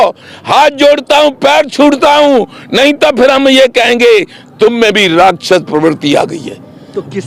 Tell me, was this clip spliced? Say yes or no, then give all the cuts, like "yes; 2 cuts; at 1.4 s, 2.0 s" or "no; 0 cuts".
no; 0 cuts